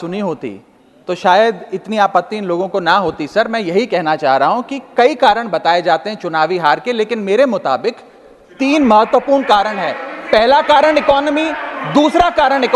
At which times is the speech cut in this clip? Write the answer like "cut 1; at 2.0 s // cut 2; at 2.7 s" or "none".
none